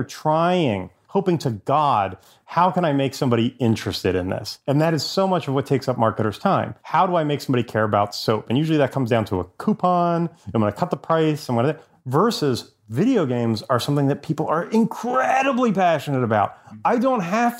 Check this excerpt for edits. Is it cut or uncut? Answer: cut